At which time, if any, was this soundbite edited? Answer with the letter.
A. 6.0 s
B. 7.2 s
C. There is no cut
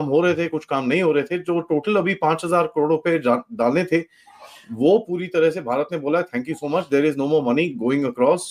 C